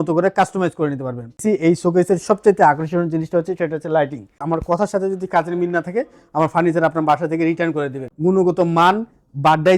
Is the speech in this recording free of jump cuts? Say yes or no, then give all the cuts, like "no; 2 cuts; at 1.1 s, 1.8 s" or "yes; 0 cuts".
no; 3 cuts; at 1.4 s, 4.4 s, 8.0 s